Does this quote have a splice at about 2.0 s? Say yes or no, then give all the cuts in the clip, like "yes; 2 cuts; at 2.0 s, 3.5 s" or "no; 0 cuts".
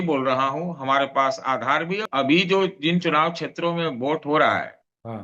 yes; 1 cut; at 2.0 s